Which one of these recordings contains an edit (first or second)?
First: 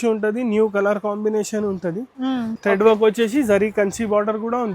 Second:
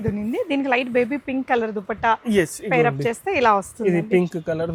first